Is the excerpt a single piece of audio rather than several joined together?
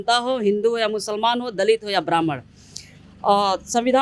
yes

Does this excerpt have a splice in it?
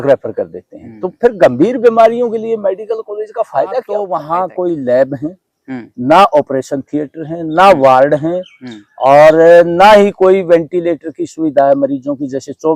yes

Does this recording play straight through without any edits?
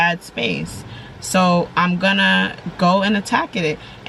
yes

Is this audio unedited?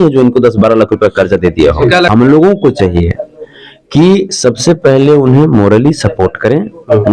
no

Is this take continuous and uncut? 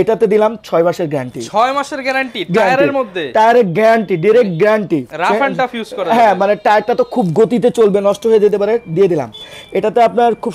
yes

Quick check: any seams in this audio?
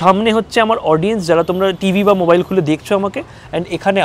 no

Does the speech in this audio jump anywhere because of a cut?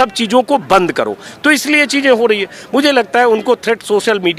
no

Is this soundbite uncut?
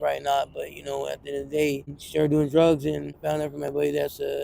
no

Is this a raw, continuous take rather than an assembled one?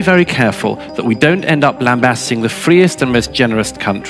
yes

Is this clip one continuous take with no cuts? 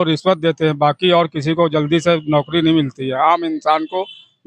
yes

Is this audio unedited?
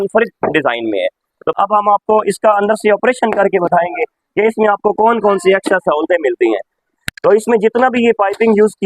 no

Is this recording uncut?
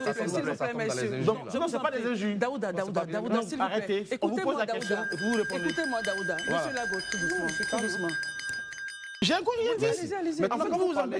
no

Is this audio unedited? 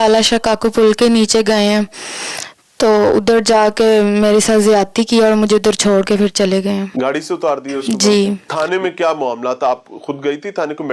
no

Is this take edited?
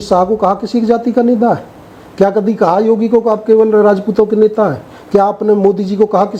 no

